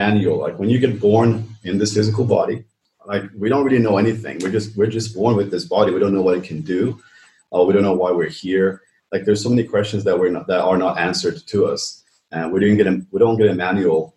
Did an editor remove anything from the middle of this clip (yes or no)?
yes